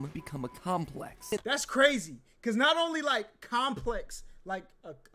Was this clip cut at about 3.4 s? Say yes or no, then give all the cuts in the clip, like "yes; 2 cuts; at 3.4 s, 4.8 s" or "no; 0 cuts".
no; 1 cut; at 1.3 s